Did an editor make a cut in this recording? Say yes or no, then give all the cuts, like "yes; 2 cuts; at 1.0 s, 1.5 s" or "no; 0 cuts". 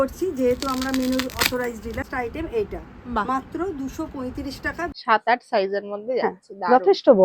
yes; 2 cuts; at 2.0 s, 4.8 s